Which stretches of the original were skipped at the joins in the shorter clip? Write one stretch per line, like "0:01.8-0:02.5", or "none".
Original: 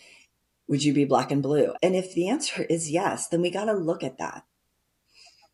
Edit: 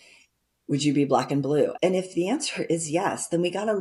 none